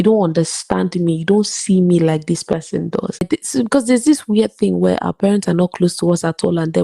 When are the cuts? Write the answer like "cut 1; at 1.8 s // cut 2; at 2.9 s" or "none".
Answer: cut 1; at 3.2 s